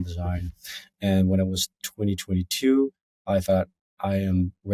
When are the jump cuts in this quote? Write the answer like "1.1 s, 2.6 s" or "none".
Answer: none